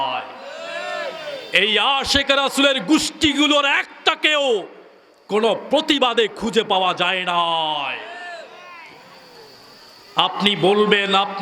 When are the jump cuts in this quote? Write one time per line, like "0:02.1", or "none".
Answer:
none